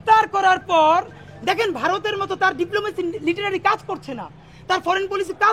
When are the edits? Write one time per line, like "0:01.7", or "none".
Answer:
none